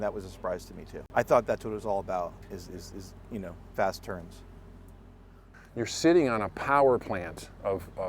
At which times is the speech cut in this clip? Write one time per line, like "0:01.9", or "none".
0:01.0
0:05.6